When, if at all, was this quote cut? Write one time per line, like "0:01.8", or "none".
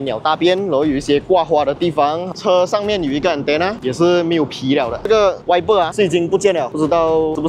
0:02.3
0:05.0